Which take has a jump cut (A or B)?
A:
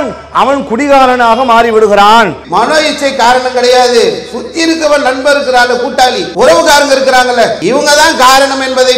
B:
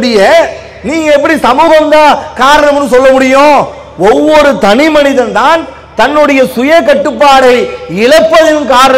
A